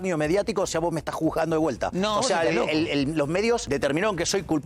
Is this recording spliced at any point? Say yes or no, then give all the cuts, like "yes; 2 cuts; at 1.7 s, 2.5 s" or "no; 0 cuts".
yes; 2 cuts; at 1.9 s, 3.6 s